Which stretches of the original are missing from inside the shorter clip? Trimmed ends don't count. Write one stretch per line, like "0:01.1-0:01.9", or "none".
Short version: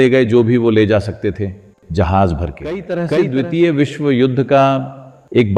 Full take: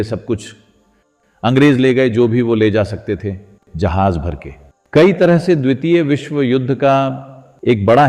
0:04.9-0:05.4